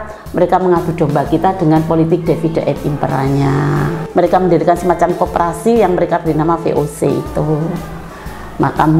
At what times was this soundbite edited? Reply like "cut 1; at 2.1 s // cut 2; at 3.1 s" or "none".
cut 1; at 4.0 s